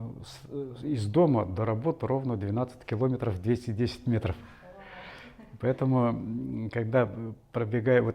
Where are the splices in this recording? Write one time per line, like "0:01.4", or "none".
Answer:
none

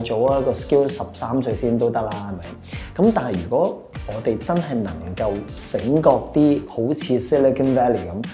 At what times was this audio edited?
none

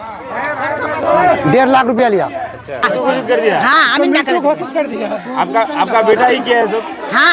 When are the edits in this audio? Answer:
0:02.8

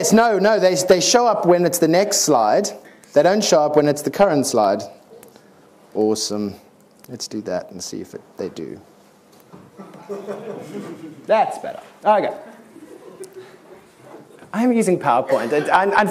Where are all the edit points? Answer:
0:10.4

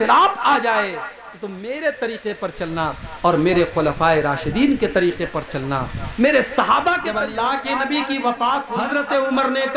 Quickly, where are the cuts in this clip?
0:07.2
0:08.9

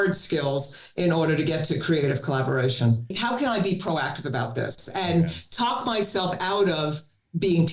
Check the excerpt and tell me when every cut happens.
0:03.2

